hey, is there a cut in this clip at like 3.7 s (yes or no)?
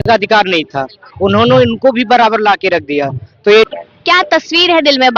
yes